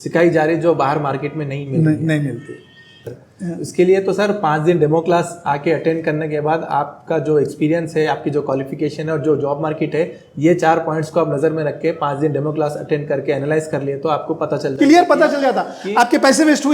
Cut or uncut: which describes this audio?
cut